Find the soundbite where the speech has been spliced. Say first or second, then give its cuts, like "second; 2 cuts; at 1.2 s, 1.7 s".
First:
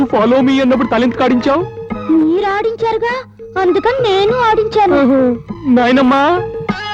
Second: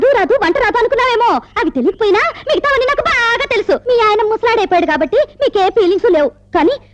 second; 1 cut; at 3.8 s